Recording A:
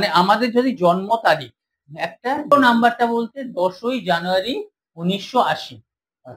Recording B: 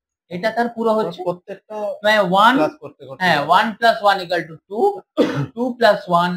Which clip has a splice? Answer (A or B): A